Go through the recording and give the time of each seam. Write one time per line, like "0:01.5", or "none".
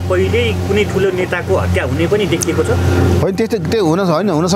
none